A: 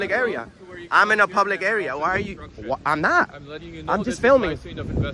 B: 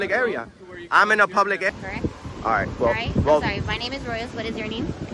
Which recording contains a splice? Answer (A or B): B